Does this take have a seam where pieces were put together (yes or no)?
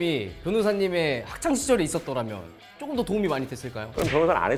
no